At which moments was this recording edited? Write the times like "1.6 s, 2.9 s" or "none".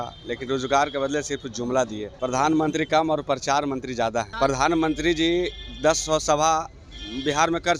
2.0 s, 4.3 s